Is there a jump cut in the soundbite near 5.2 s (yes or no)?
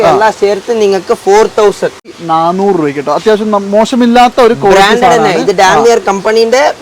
no